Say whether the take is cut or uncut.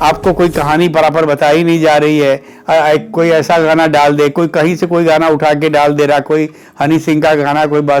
uncut